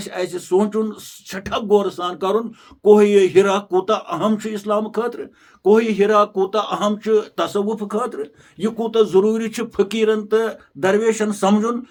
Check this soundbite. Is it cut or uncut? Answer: uncut